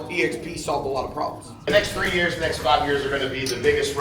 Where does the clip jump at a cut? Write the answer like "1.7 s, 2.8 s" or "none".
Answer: 1.5 s